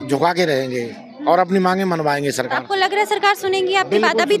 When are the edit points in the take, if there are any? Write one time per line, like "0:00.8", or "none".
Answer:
none